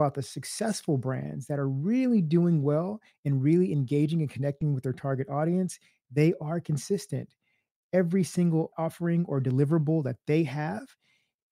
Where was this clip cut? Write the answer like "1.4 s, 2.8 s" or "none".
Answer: 8.7 s